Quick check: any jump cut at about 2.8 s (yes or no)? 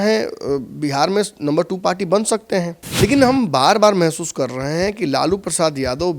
yes